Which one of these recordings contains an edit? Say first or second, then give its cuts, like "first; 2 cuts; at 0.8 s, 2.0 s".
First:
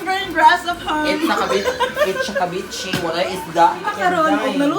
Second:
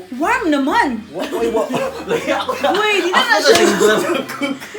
first; 1 cut; at 3.9 s